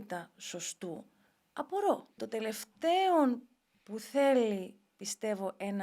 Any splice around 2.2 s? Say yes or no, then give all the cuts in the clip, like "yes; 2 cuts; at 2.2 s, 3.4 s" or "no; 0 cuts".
yes; 1 cut; at 2.2 s